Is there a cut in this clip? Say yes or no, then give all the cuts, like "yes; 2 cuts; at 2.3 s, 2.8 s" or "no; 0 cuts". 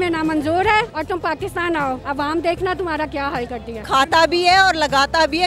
yes; 3 cuts; at 0.9 s, 2.0 s, 3.7 s